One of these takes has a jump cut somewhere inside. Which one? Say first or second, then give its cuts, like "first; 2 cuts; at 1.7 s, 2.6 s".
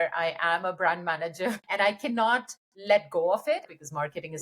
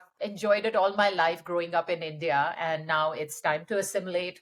first; 2 cuts; at 1.6 s, 3.6 s